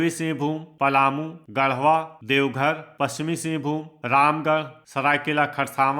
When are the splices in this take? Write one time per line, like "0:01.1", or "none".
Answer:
0:00.9
0:02.2
0:04.8